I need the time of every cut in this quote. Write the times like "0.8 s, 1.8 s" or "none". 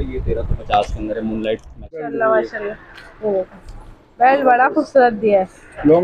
2.1 s